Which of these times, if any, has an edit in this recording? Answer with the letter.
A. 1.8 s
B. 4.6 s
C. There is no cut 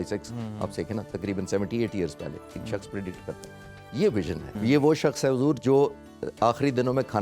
B